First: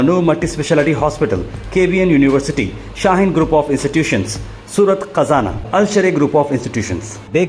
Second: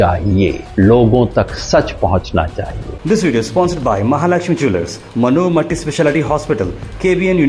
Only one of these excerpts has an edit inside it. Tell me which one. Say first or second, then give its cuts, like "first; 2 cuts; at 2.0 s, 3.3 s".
second; 1 cut; at 2.9 s